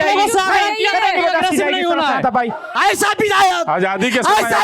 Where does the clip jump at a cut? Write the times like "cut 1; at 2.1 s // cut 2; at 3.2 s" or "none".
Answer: cut 1; at 2.7 s